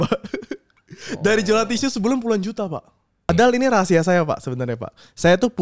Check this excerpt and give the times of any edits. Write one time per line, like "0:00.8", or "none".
0:03.3